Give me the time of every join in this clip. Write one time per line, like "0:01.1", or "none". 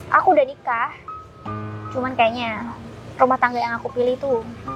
none